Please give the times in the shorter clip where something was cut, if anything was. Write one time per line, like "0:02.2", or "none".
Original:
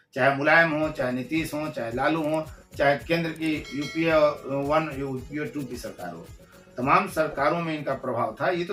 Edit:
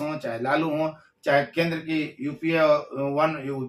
none